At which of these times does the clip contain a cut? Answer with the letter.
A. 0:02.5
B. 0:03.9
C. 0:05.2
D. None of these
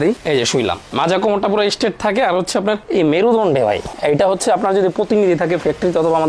D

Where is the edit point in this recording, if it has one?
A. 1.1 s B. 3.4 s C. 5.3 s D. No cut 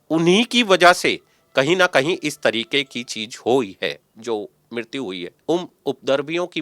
C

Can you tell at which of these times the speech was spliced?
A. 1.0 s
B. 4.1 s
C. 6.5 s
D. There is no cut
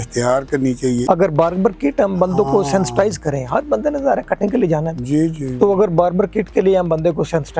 A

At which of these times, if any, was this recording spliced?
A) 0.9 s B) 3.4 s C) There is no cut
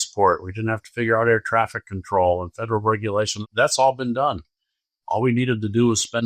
B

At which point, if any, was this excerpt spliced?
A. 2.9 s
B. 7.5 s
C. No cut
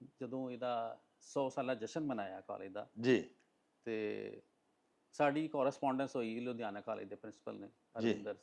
C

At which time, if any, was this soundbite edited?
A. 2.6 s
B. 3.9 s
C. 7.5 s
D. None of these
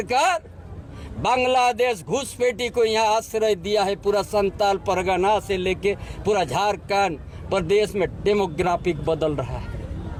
D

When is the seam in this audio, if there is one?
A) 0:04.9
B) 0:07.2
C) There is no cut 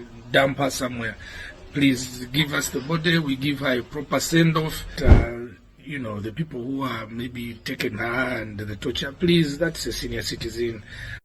A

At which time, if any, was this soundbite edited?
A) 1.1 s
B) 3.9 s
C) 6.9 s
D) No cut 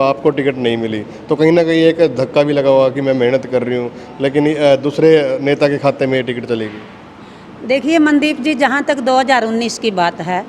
D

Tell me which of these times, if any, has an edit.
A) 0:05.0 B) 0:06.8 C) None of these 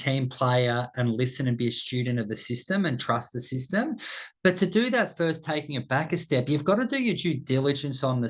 C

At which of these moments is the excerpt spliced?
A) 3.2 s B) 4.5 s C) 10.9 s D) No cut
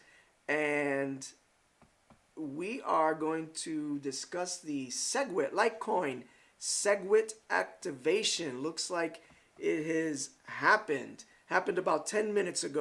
D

